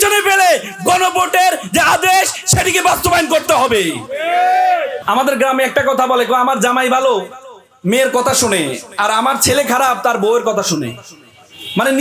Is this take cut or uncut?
cut